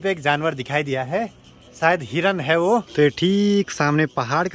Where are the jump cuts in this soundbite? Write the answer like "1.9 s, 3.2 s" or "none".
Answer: none